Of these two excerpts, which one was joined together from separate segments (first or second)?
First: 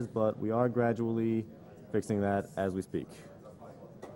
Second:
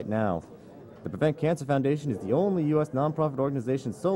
first